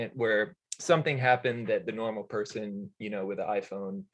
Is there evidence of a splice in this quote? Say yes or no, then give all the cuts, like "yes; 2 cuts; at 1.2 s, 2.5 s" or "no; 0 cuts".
no; 0 cuts